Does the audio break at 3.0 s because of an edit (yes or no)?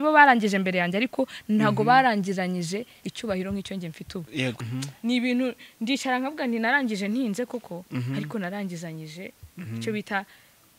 no